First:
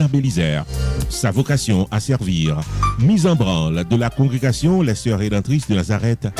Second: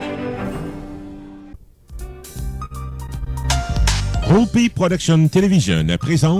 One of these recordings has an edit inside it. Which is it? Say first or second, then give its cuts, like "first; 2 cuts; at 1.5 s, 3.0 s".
second; 1 cut; at 1.5 s